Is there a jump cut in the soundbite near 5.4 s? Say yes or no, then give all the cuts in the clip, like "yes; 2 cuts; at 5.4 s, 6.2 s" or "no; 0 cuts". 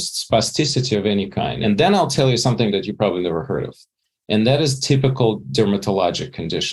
yes; 2 cuts; at 1.6 s, 5.4 s